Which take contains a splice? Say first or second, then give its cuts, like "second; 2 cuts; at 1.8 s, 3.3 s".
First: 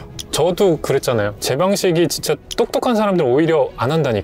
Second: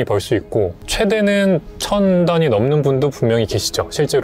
first; 1 cut; at 1.4 s